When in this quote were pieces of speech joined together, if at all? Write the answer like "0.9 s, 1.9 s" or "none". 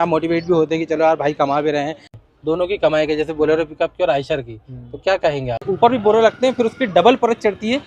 2.2 s, 5.6 s